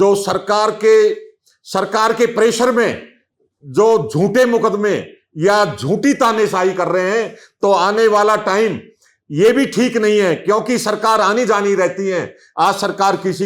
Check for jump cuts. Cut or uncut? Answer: uncut